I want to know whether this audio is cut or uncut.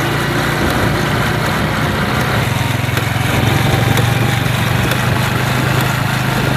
uncut